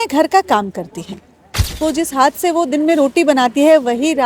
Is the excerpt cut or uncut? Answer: cut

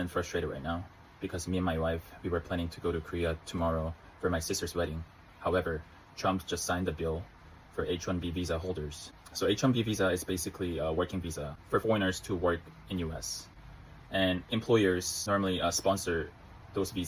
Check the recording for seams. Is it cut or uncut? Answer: uncut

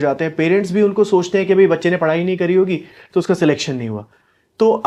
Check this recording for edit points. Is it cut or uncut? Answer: uncut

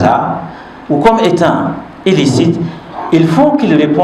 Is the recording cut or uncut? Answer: uncut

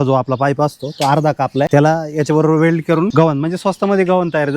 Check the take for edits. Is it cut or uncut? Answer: cut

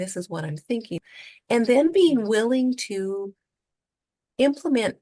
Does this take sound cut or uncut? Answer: cut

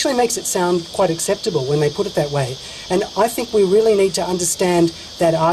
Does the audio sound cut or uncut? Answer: cut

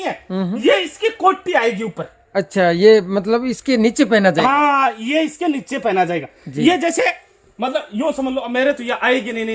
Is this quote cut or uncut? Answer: uncut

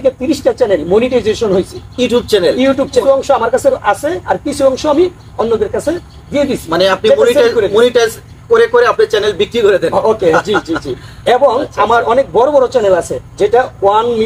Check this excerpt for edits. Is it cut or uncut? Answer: cut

